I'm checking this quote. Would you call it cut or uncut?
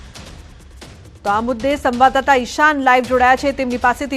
cut